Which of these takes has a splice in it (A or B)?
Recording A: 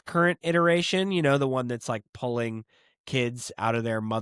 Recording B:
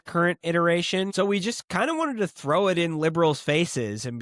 B